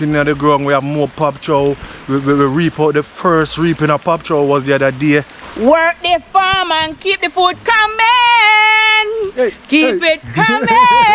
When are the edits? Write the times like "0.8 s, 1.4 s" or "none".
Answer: 5.4 s